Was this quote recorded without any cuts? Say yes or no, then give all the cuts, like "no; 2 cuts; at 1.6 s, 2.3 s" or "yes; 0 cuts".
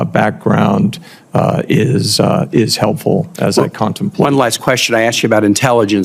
yes; 0 cuts